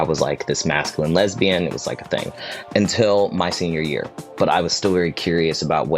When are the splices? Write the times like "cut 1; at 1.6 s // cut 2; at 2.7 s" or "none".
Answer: cut 1; at 4.2 s